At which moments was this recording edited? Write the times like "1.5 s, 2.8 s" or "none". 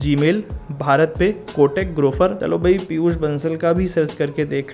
2.4 s